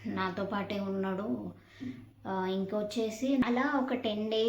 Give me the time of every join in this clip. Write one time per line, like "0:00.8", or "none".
0:03.4